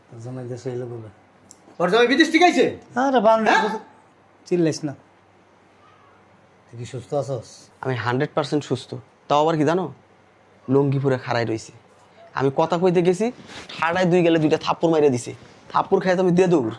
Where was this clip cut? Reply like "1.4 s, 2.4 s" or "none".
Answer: 1.6 s, 7.6 s